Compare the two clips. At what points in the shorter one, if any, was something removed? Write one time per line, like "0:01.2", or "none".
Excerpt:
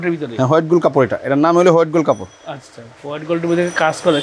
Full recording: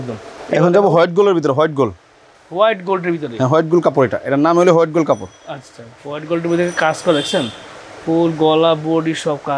none